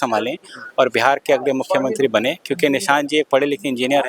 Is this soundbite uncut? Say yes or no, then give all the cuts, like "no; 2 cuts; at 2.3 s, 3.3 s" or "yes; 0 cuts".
yes; 0 cuts